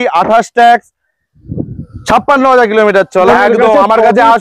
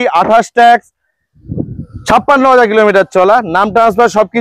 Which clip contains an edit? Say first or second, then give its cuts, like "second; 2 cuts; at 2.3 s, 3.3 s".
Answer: first; 1 cut; at 3.3 s